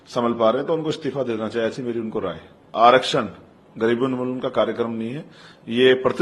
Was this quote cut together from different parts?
yes; 1 cut; at 2.7 s

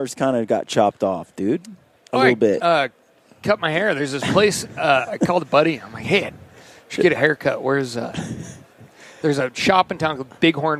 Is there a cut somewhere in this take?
no; 0 cuts

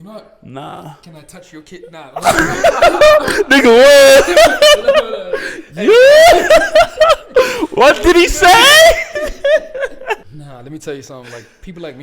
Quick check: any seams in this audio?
yes; 1 cut; at 10.2 s

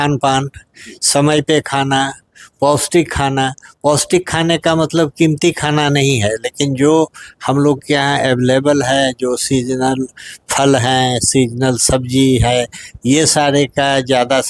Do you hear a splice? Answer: no; 0 cuts

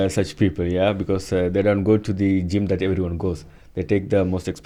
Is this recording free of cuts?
yes; 0 cuts

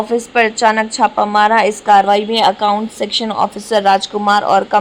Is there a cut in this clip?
no; 0 cuts

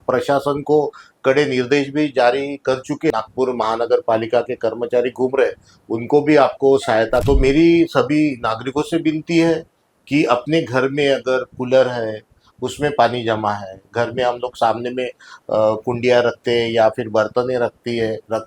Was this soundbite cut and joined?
yes; 2 cuts; at 3.1 s, 7.2 s

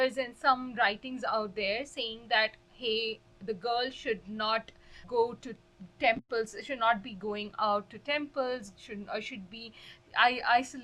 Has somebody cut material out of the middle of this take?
no; 0 cuts

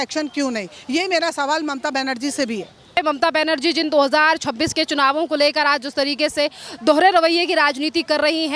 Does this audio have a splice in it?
no; 0 cuts

